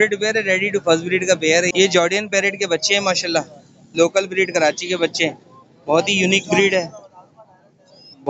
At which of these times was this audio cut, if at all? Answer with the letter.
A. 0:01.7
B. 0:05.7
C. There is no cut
A